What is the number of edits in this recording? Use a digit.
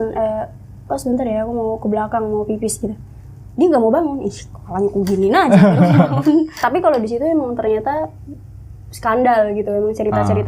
1